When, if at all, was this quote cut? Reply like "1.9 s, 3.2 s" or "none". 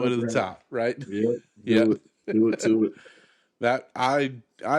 none